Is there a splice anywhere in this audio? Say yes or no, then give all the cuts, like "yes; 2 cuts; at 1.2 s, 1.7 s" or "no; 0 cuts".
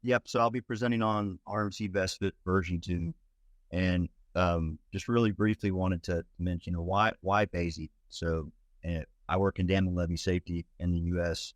no; 0 cuts